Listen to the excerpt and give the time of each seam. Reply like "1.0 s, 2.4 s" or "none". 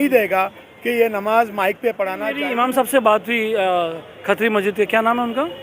2.3 s

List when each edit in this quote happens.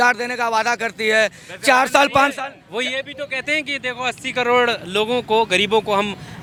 none

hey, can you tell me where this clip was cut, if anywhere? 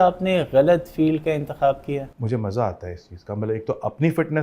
2.1 s

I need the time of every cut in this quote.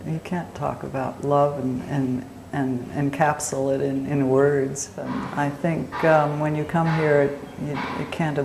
5.1 s

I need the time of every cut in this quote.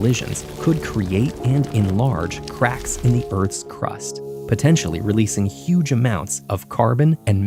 none

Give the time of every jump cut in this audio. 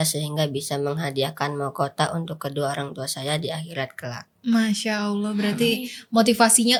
none

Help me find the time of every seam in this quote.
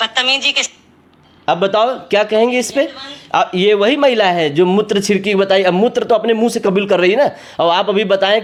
none

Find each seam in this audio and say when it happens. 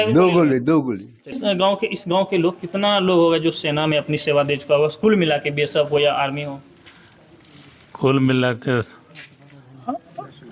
1.4 s

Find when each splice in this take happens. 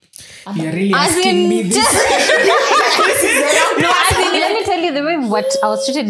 4.3 s

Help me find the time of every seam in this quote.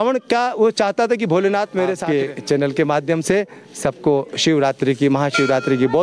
2.0 s

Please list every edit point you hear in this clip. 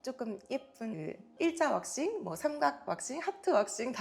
0.9 s

